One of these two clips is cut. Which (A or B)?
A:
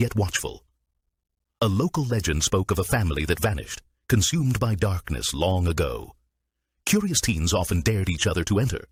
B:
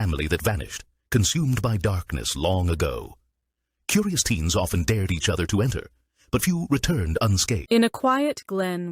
B